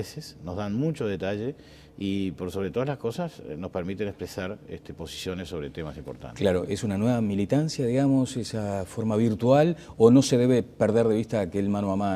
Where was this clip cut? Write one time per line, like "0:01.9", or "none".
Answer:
0:02.5